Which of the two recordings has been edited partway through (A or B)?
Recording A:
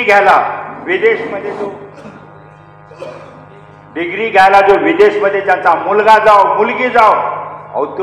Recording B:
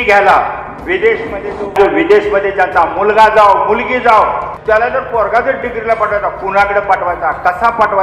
B